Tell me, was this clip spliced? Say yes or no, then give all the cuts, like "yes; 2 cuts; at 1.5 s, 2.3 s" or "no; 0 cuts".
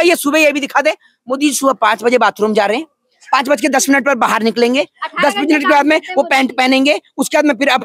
no; 0 cuts